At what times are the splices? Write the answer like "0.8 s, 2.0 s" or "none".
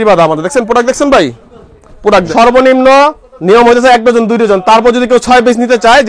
2.3 s